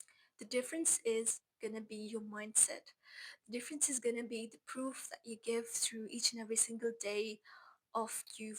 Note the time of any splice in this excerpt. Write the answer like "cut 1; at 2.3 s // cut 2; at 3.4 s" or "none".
cut 1; at 1.4 s